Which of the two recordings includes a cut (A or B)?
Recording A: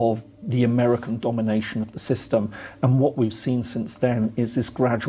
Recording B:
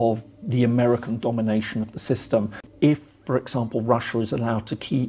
B